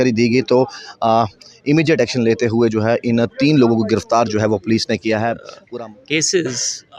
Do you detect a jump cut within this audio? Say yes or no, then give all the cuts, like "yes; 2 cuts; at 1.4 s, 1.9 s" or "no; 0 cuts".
yes; 1 cut; at 5.5 s